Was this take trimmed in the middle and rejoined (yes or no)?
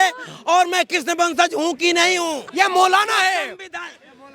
yes